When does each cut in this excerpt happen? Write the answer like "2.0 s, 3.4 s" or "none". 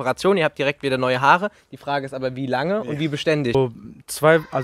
3.5 s